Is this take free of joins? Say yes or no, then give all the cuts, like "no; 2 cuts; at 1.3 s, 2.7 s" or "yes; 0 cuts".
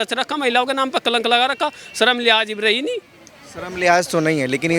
yes; 0 cuts